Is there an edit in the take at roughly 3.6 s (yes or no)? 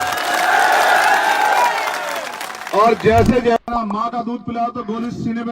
yes